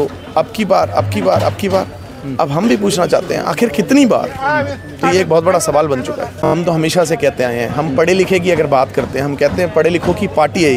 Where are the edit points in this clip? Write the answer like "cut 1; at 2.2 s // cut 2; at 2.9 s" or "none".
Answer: cut 1; at 6.5 s